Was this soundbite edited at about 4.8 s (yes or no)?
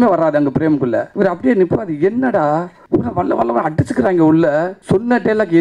yes